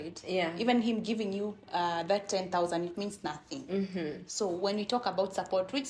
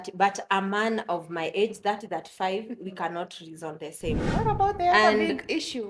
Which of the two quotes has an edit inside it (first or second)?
second